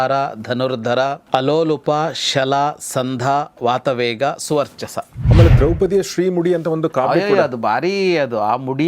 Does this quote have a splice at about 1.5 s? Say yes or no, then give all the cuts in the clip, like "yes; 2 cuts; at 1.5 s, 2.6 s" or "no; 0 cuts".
no; 1 cut; at 5.2 s